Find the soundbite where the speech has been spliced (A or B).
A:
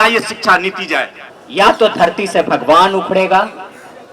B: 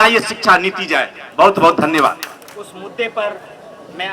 A